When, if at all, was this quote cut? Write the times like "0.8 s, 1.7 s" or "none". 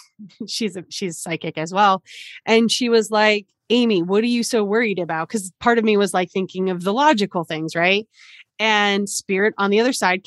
3.5 s

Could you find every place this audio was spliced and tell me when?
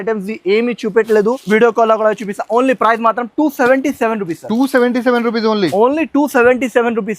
1.4 s

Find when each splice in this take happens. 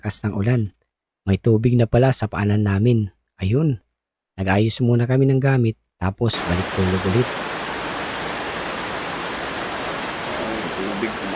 7.3 s

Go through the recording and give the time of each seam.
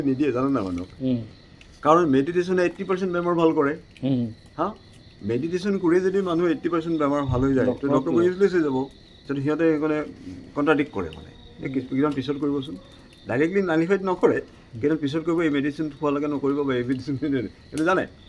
none

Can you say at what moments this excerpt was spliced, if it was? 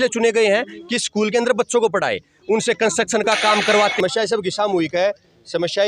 4.0 s

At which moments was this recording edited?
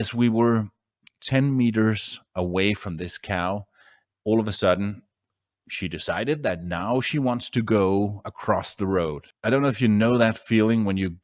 9.3 s

